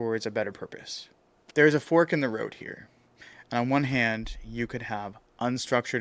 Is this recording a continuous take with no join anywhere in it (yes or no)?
yes